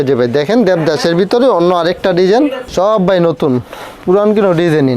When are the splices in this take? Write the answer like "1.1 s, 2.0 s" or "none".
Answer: 2.6 s